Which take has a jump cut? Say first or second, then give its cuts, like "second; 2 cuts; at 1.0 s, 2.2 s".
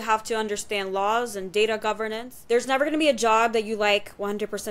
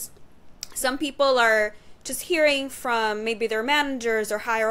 first; 1 cut; at 2.3 s